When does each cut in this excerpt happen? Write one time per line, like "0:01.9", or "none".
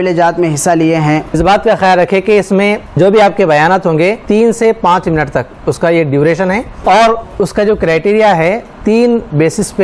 0:01.3
0:03.0
0:04.2
0:06.7